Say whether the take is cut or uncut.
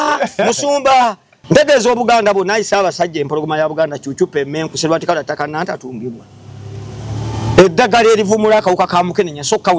cut